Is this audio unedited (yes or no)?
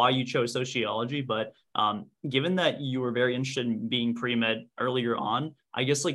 yes